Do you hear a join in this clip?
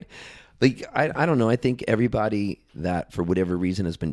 no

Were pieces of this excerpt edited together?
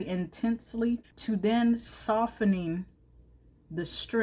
yes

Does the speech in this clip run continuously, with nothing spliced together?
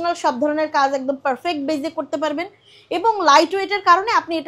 yes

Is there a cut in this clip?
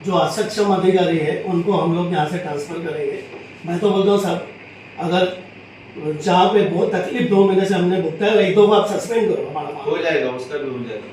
no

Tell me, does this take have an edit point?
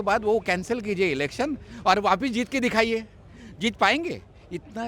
no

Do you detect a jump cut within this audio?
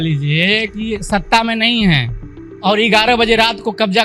no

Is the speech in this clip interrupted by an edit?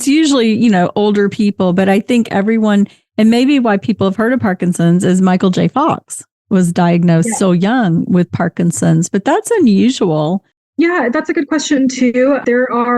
yes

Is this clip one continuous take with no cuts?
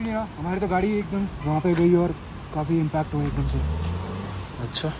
yes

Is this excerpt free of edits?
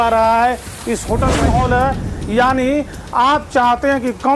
no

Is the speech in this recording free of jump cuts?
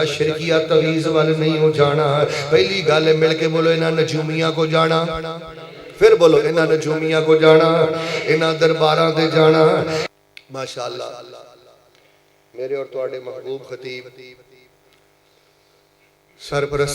no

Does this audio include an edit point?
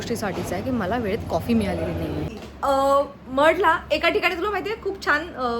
yes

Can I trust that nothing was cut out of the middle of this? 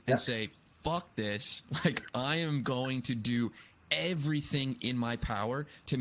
yes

